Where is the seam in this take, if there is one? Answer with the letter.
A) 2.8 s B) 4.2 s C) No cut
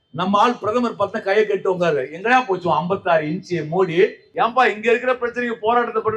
B